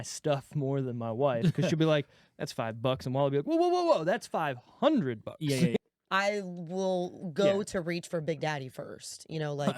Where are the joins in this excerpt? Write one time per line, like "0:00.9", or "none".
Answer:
0:05.8